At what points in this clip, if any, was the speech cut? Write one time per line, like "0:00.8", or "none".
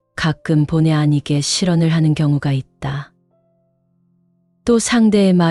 none